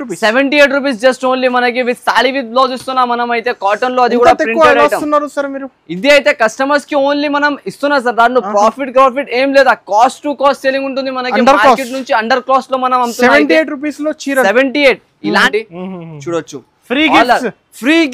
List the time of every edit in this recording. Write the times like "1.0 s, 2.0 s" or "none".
15.5 s